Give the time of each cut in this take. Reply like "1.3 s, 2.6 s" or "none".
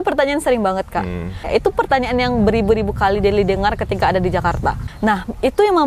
1.4 s, 4.9 s